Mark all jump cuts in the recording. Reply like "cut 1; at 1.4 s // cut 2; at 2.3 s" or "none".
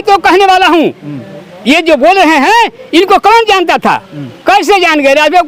none